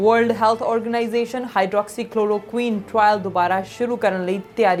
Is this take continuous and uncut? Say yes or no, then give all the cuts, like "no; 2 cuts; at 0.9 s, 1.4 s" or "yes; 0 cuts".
yes; 0 cuts